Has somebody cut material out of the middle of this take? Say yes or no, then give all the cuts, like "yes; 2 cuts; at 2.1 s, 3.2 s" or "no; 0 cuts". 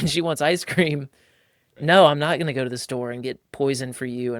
no; 0 cuts